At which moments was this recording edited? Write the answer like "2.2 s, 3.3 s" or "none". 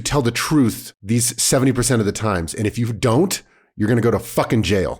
0.9 s